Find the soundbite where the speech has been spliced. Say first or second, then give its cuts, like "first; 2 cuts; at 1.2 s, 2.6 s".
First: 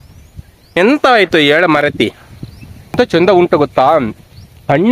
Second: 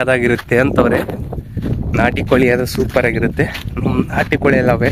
first; 2 cuts; at 0.8 s, 3.0 s